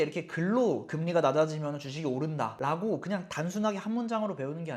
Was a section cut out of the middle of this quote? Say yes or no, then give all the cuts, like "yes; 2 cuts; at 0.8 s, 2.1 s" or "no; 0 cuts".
no; 0 cuts